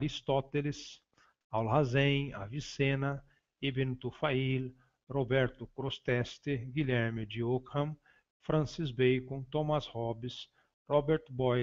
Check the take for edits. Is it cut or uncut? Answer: uncut